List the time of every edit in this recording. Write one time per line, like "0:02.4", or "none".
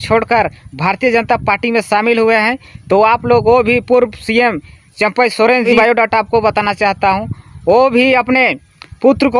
0:05.6